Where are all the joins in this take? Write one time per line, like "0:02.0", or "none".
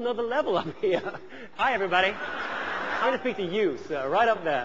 0:01.4
0:03.0